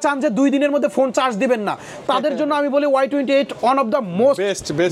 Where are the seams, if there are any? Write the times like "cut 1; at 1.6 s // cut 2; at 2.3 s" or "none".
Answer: none